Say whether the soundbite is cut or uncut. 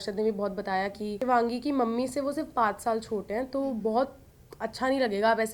cut